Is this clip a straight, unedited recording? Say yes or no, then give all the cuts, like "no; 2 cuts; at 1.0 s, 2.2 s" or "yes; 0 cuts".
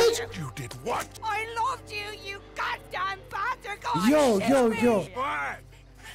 no; 2 cuts; at 1.1 s, 5.1 s